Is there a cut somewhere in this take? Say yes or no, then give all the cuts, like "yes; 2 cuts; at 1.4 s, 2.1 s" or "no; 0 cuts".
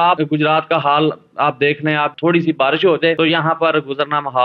yes; 1 cut; at 2.1 s